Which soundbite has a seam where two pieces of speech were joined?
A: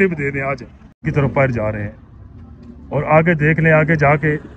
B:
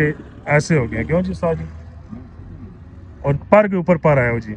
A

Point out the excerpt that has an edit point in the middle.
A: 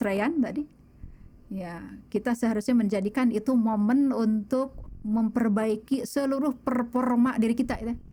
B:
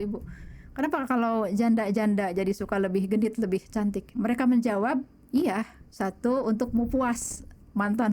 B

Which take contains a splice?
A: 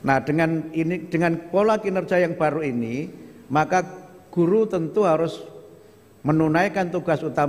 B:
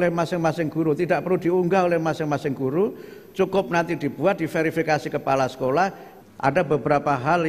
B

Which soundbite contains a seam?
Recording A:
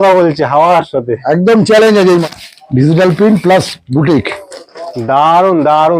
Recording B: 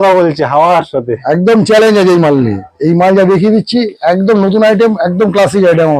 A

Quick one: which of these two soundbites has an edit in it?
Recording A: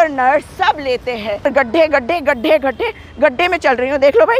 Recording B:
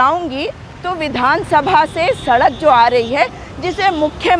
A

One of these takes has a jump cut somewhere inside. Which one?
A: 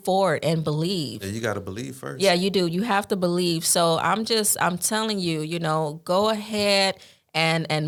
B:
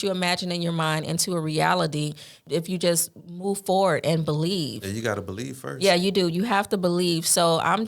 B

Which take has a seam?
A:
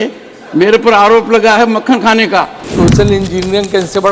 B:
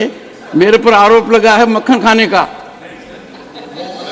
A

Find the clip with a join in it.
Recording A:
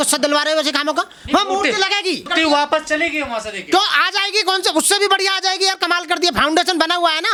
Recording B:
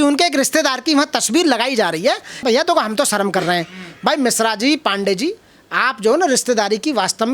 B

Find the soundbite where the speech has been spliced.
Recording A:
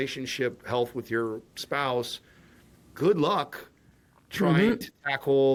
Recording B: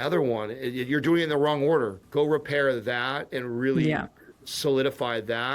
B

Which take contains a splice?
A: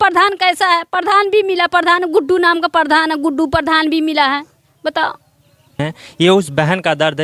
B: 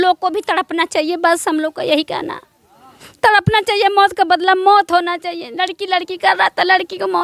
A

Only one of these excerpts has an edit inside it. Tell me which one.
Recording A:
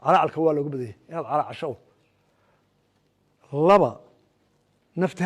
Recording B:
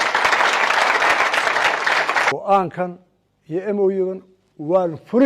B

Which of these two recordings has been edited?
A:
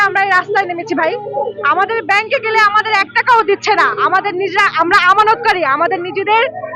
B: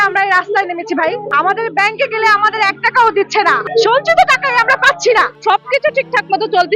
B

